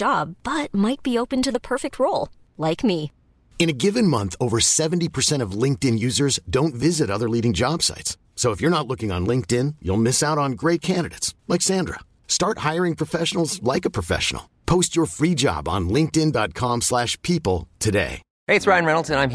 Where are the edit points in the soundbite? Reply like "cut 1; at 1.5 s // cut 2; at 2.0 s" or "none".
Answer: cut 1; at 18.3 s